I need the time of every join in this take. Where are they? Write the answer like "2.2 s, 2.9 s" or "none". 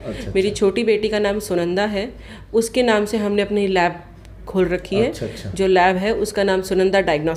none